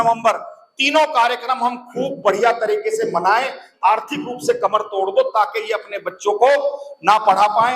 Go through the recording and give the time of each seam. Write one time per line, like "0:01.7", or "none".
0:03.6